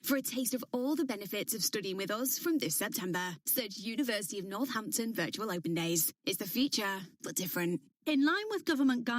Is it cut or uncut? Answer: cut